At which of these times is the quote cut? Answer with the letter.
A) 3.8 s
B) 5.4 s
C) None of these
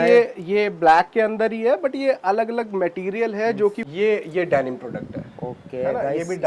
A